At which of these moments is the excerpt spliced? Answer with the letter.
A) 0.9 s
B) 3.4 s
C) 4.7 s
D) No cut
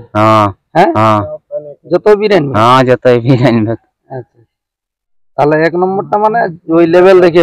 D